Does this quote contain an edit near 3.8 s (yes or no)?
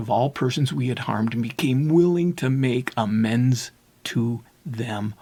no